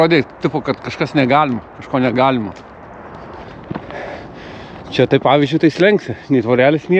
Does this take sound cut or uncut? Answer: cut